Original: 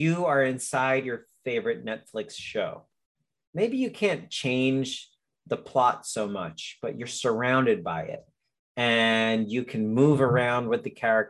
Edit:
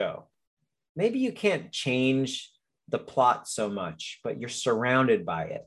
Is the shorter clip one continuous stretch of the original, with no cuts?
yes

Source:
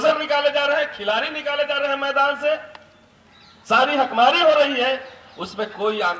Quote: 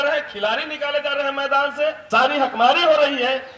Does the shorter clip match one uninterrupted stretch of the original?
no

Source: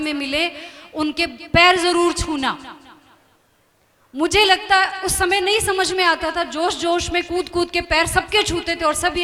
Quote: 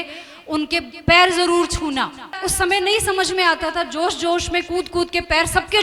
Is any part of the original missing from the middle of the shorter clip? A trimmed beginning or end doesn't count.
yes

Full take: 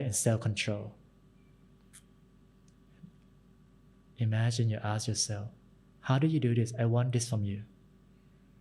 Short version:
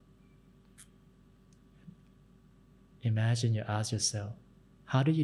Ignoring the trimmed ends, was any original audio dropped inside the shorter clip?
no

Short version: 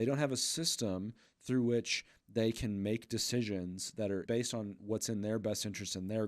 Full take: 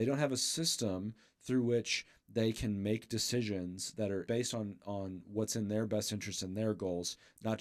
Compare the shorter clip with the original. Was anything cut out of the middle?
yes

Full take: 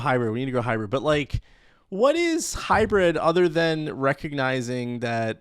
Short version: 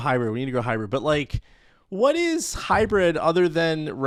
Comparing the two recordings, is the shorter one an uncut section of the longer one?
yes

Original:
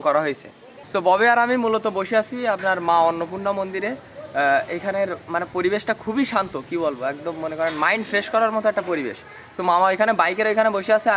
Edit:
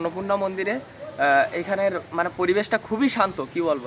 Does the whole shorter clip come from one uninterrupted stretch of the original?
yes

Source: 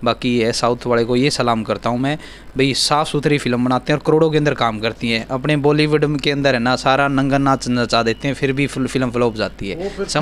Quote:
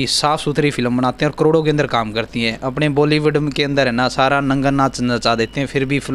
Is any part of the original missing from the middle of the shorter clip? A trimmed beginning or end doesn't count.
no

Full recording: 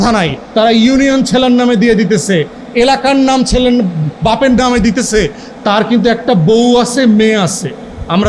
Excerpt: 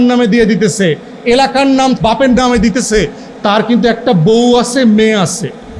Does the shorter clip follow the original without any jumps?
no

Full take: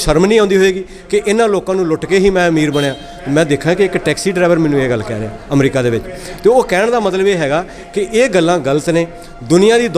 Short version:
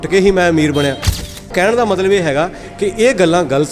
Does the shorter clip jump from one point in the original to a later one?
yes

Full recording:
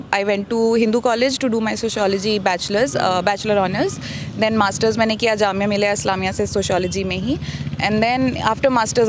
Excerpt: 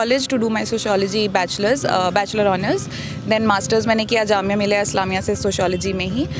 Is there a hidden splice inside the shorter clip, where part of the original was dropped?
no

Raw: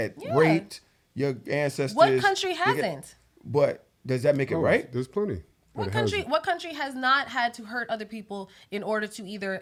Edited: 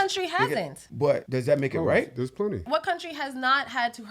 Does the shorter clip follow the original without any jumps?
no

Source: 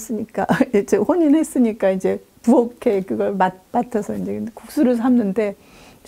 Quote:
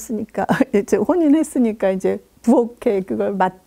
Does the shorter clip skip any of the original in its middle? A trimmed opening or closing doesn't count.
no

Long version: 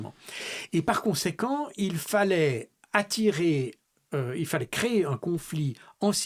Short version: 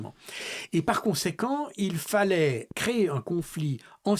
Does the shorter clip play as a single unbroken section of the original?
no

